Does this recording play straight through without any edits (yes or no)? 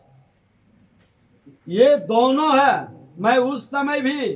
yes